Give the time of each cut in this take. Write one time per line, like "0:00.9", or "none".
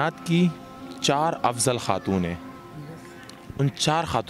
none